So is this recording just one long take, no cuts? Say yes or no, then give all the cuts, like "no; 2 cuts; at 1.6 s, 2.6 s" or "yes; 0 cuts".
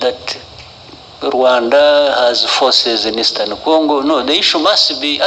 yes; 0 cuts